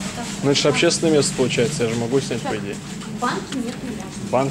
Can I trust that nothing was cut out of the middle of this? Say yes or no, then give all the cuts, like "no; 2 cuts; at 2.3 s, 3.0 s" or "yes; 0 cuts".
yes; 0 cuts